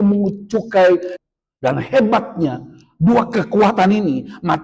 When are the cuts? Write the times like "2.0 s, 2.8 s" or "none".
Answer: 1.1 s